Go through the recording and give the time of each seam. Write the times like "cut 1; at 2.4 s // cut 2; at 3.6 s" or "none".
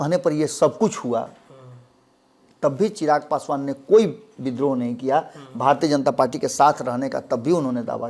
none